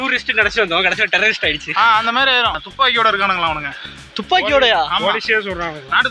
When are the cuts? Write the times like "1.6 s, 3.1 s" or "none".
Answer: 2.6 s